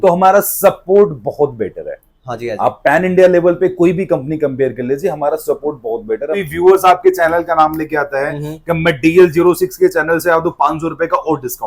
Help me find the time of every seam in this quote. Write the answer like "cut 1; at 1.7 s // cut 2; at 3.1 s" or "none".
cut 1; at 6.4 s